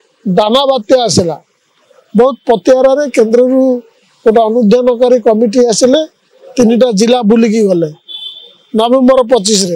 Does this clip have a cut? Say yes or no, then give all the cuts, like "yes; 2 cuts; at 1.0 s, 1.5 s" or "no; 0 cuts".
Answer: no; 0 cuts